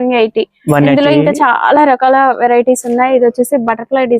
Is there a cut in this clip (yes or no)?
no